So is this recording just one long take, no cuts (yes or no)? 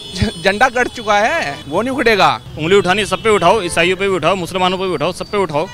no